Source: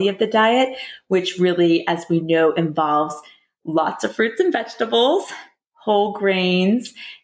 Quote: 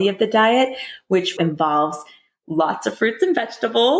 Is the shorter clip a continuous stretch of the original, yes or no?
no